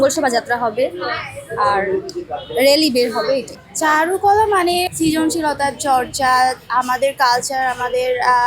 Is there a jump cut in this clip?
yes; 2 cuts; at 3.5 s, 4.9 s

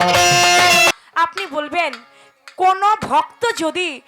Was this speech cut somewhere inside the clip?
yes; 1 cut; at 0.9 s

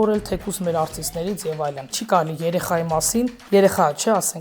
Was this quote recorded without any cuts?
no; 1 cut; at 2.0 s

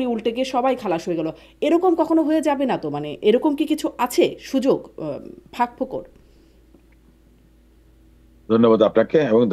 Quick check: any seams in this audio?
no; 0 cuts

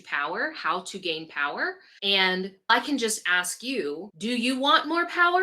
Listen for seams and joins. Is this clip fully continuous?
no; 3 cuts; at 1.9 s, 2.7 s, 4.1 s

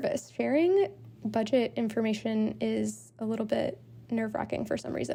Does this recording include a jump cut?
no; 0 cuts

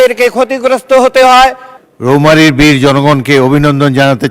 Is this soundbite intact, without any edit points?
no; 1 cut; at 1.7 s

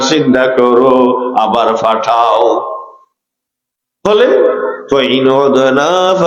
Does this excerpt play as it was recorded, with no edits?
yes; 0 cuts

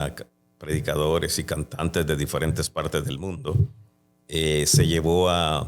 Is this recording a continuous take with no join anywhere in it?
yes; 0 cuts

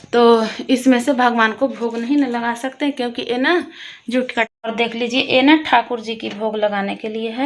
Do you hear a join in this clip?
yes; 1 cut; at 4.7 s

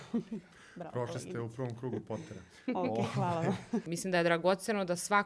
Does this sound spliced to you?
yes; 1 cut; at 3.9 s

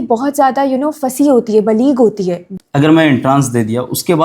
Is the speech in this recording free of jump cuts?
no; 1 cut; at 2.4 s

